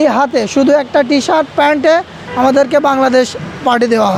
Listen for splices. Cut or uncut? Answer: uncut